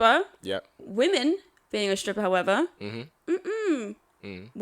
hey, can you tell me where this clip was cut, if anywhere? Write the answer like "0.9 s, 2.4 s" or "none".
none